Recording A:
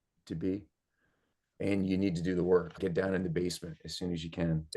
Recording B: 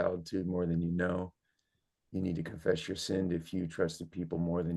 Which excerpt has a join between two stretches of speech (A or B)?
A